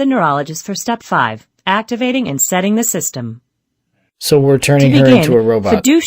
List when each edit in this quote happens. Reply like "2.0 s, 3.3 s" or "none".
4.3 s